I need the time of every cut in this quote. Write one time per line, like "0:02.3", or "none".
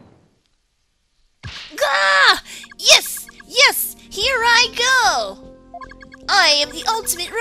none